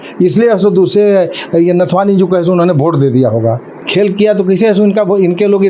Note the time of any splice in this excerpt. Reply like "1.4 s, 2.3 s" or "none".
3.8 s